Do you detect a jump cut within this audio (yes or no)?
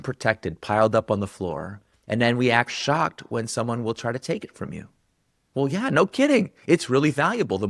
no